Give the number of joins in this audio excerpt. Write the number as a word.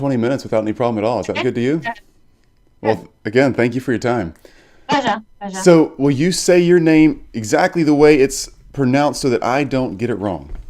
one